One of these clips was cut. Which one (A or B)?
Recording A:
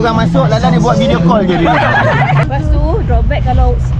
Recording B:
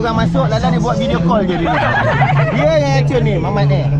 A